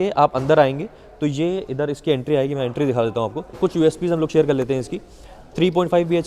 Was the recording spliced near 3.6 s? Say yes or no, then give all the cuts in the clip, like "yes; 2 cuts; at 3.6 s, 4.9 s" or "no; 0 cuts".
yes; 1 cut; at 3.6 s